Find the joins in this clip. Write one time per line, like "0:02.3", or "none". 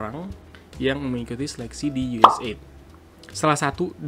none